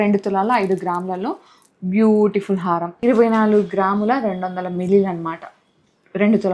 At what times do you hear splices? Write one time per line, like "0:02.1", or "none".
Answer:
0:02.9